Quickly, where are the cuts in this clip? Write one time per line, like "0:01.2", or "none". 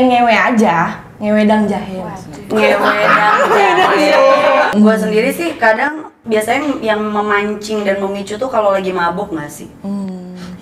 none